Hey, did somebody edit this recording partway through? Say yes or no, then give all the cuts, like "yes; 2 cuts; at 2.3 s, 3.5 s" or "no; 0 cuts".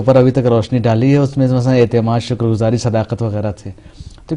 no; 0 cuts